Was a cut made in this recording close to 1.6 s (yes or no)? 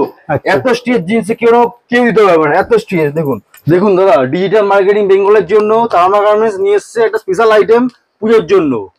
no